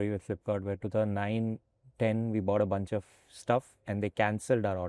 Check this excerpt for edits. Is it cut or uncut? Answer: uncut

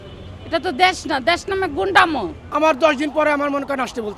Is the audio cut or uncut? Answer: cut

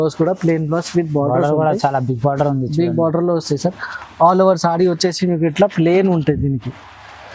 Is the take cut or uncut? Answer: uncut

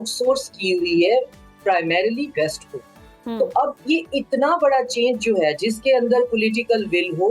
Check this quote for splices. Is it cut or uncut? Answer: uncut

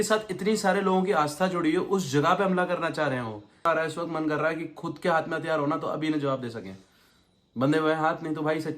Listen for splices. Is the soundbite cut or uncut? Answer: cut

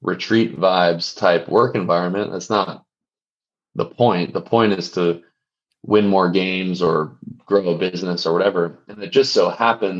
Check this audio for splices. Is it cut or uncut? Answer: uncut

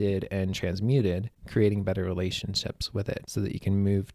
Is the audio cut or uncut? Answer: cut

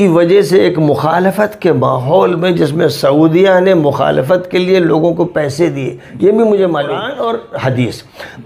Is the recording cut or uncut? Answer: cut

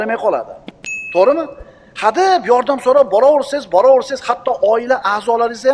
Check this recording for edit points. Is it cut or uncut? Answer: uncut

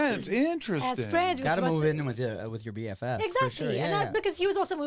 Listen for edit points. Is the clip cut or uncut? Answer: uncut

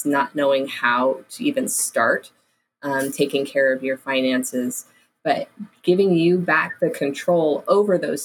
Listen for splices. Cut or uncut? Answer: uncut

